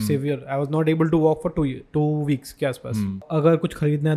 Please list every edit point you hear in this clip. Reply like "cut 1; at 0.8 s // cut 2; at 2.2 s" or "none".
cut 1; at 3.3 s